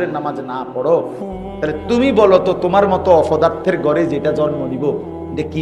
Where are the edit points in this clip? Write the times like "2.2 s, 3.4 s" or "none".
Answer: none